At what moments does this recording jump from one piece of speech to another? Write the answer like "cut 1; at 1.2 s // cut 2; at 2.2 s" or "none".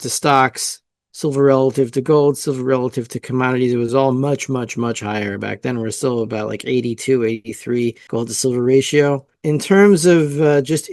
cut 1; at 8.0 s // cut 2; at 9.3 s